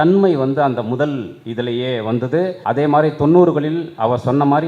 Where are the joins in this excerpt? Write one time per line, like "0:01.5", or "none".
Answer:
0:02.6